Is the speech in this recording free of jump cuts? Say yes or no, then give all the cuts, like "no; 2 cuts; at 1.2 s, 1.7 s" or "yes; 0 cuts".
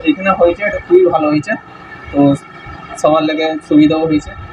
yes; 0 cuts